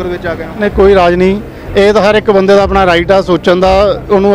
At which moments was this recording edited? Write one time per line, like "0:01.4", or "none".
none